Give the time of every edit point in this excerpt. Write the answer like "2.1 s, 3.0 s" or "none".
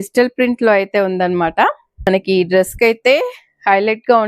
2.1 s